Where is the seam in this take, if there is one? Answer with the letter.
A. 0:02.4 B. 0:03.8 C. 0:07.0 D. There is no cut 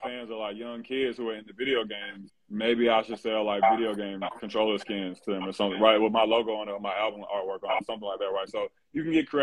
D